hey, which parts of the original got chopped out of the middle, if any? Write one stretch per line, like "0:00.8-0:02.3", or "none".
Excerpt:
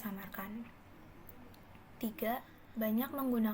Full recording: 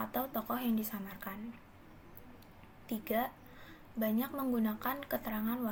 0:03.4-0:03.8